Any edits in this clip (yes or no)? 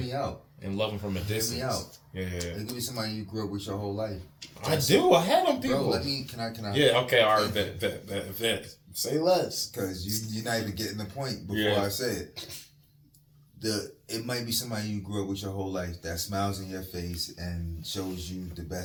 no